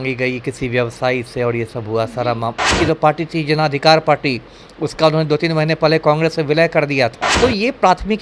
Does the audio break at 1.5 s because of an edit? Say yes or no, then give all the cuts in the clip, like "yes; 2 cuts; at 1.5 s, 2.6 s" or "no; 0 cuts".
no; 2 cuts; at 2.7 s, 7.2 s